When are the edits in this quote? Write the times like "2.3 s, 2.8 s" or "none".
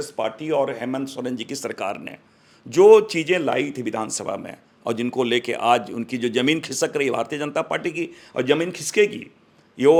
none